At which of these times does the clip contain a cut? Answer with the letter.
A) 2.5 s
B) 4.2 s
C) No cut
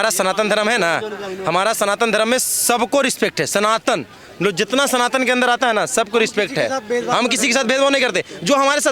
C